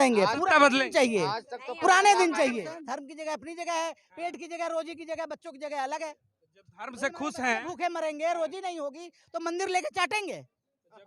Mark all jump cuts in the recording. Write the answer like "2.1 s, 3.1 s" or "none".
2.7 s

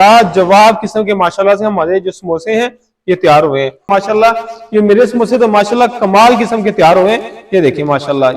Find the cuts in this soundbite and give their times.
3.8 s

